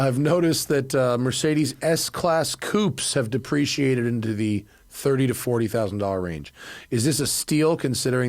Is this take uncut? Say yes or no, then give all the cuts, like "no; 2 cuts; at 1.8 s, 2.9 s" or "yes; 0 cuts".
yes; 0 cuts